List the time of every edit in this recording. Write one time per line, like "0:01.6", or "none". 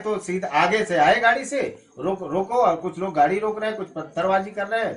none